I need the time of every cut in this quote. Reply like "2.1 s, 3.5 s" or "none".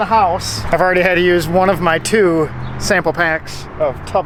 none